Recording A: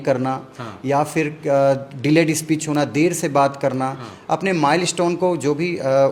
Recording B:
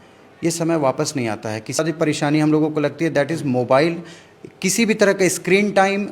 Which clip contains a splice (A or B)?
B